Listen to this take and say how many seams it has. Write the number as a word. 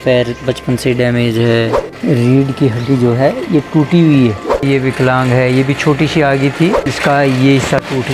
three